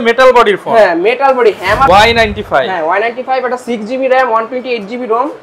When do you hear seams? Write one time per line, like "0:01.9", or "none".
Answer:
0:01.9